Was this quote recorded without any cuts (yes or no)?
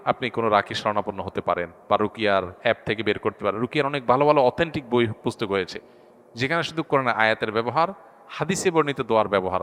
yes